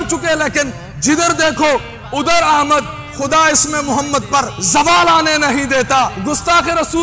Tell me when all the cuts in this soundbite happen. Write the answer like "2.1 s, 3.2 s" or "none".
3.0 s, 4.6 s, 6.2 s